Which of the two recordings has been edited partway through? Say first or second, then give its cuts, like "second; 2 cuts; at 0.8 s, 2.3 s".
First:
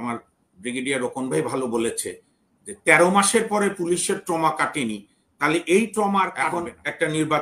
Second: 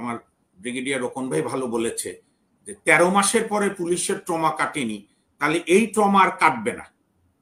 first; 1 cut; at 6.4 s